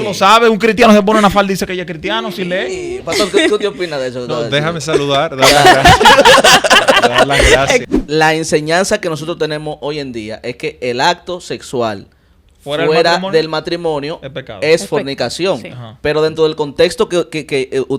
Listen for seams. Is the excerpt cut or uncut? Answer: cut